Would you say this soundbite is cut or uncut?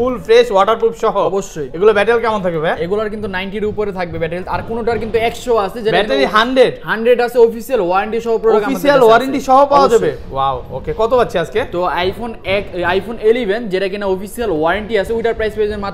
uncut